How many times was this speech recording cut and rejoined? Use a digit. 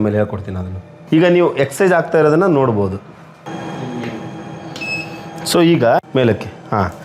1